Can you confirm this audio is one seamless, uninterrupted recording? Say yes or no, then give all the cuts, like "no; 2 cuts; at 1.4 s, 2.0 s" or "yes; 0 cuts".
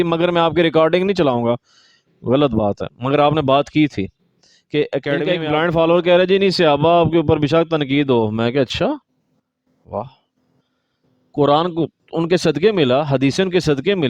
no; 1 cut; at 5.3 s